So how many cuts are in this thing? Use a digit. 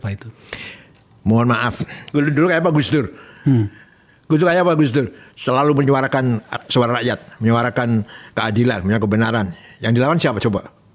1